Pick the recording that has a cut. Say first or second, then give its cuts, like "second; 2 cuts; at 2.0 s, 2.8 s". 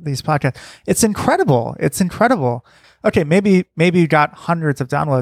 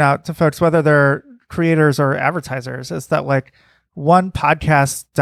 first; 1 cut; at 2.8 s